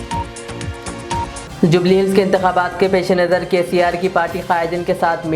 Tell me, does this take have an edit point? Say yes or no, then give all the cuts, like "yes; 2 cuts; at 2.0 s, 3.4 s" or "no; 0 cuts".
yes; 1 cut; at 1.4 s